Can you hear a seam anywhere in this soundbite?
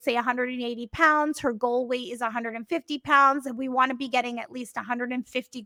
no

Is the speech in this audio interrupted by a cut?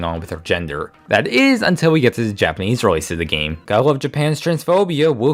no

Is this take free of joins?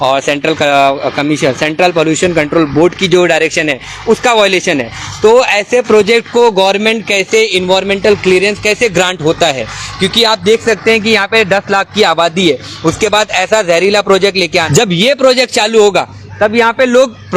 no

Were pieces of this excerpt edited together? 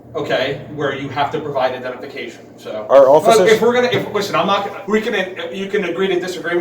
yes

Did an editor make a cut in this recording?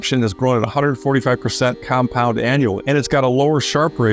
yes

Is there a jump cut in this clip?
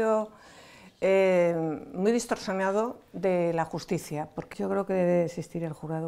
yes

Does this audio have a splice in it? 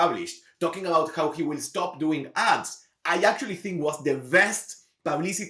no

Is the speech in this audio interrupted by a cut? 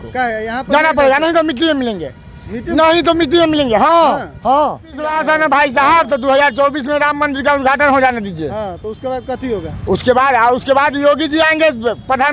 yes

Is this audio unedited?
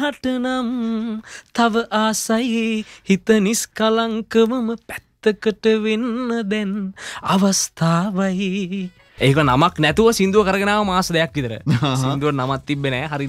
no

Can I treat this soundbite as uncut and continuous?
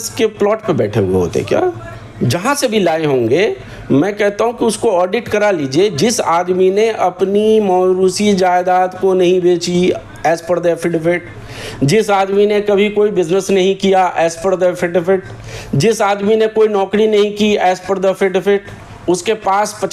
yes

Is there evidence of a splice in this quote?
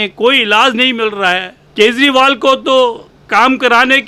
yes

